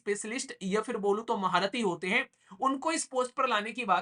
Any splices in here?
no; 0 cuts

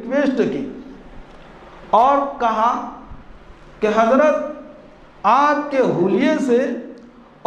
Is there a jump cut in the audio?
no; 0 cuts

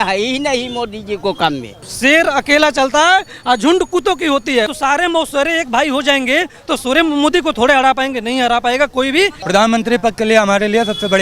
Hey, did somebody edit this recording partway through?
yes; 3 cuts; at 1.9 s, 4.7 s, 9.4 s

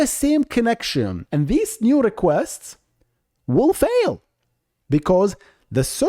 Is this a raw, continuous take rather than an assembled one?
no; 1 cut; at 1.2 s

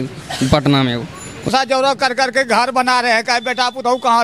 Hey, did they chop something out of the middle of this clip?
yes; 1 cut; at 1.5 s

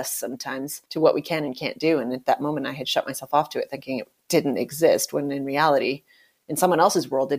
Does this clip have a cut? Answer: no; 0 cuts

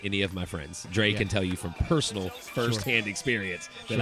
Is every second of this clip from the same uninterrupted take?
yes; 0 cuts

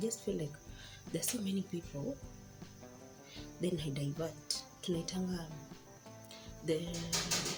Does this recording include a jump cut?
no; 0 cuts

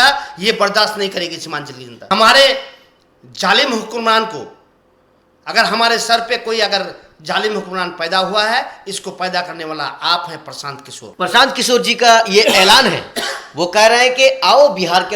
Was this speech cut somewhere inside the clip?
yes; 2 cuts; at 1.9 s, 11.0 s

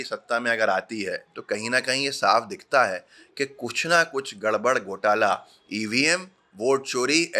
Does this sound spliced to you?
no; 0 cuts

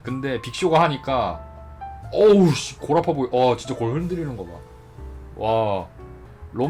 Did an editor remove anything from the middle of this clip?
no; 0 cuts

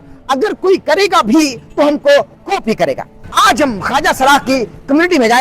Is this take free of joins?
no; 1 cut; at 3.3 s

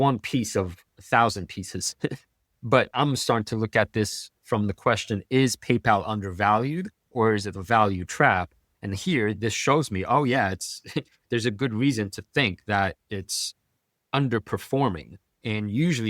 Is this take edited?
no; 0 cuts

